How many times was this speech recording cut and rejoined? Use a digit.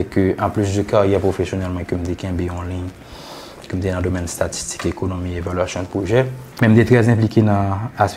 1